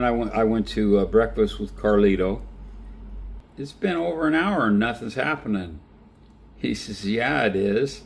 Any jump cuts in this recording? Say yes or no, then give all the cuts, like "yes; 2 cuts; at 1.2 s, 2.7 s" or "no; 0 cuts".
yes; 1 cut; at 3.4 s